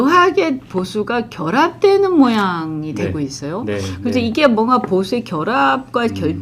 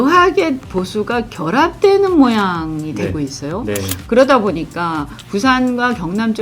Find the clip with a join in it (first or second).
second